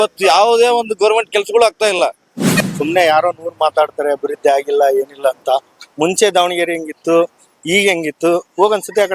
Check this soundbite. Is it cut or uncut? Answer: cut